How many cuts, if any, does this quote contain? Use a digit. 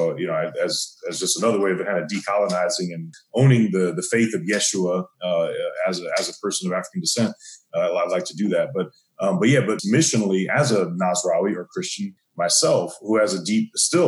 3